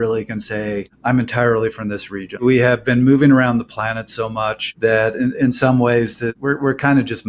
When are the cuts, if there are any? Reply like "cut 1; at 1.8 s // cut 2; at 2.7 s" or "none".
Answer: cut 1; at 0.9 s // cut 2; at 2.4 s // cut 3; at 4.6 s // cut 4; at 6.4 s

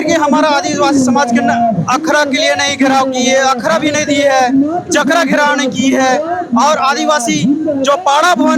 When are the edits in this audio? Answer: none

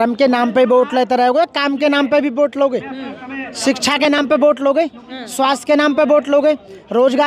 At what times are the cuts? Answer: none

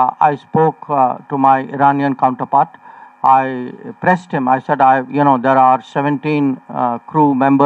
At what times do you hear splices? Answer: none

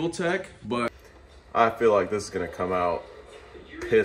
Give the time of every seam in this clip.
cut 1; at 1.1 s

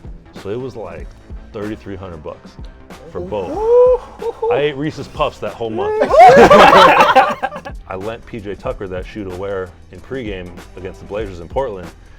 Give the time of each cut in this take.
cut 1; at 7.5 s

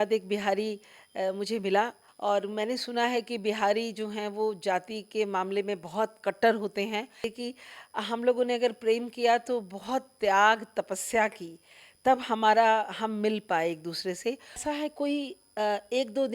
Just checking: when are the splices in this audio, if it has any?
cut 1; at 2.0 s // cut 2; at 7.3 s // cut 3; at 14.6 s

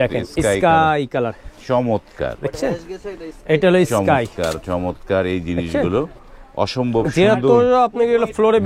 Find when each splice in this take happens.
none

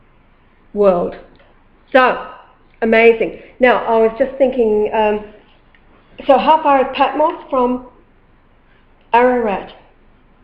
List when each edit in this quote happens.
cut 1; at 3.4 s

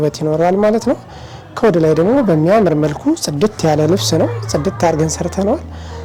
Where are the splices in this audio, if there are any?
none

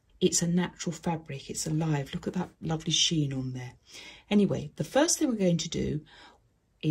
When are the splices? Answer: none

